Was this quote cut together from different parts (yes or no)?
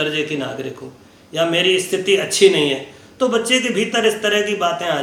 no